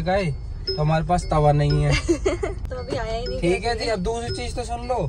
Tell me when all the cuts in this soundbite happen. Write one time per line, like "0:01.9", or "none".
0:02.4